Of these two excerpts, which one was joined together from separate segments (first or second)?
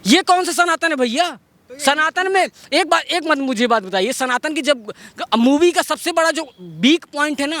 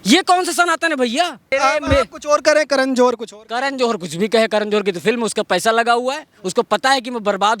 second